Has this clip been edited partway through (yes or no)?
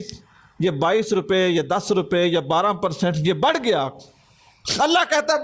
no